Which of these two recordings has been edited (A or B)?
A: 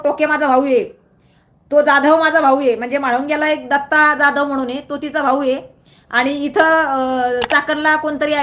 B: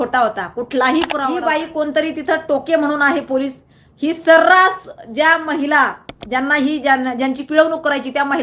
B